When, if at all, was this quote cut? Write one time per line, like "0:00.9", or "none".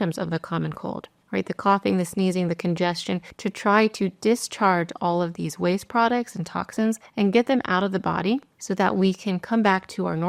none